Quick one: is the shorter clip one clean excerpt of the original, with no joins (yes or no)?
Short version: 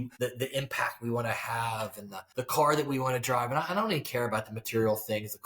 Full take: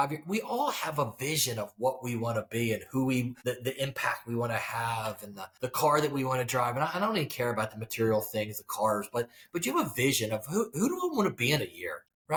yes